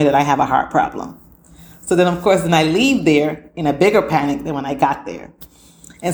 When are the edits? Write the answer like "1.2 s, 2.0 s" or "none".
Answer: none